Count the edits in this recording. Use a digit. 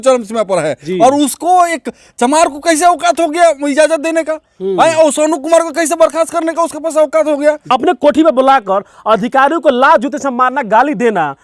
1